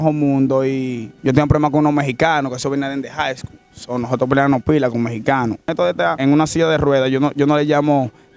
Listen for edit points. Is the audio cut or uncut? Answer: cut